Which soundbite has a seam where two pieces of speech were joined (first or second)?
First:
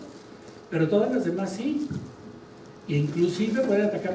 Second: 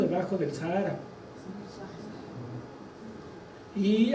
second